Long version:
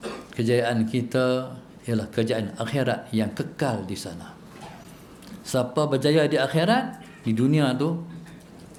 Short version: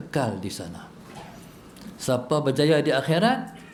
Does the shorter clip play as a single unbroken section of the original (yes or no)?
yes